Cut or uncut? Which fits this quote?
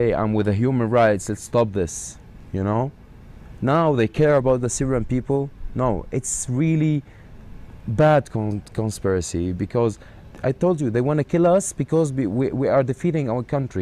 uncut